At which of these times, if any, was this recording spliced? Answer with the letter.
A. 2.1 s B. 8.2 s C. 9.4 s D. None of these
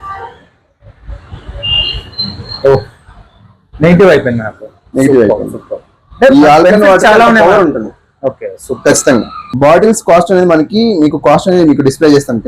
C